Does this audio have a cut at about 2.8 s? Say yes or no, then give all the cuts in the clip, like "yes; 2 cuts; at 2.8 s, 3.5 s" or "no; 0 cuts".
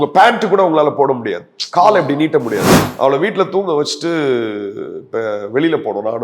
yes; 1 cut; at 2.8 s